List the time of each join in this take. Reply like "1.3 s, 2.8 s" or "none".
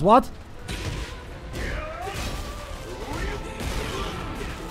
none

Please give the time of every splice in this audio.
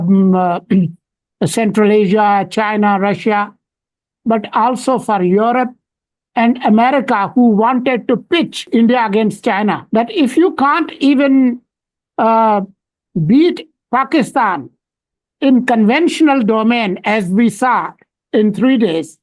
8.6 s, 9.8 s

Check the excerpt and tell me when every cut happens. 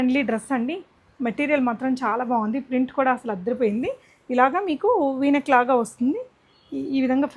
none

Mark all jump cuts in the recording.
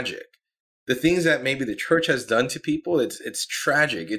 none

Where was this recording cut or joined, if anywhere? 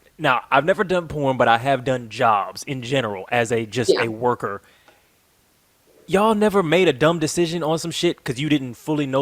none

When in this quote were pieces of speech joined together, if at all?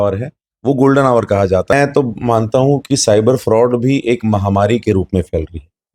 1.7 s

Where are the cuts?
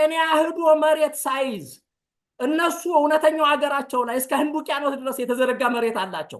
none

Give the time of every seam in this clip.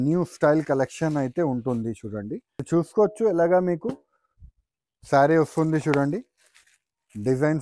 2.6 s

